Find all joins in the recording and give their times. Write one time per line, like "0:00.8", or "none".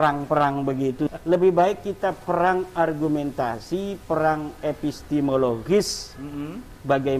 0:01.1